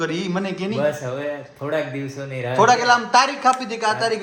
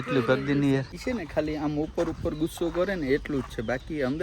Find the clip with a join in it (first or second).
second